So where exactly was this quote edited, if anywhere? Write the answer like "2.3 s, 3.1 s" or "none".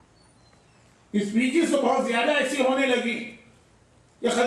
2.2 s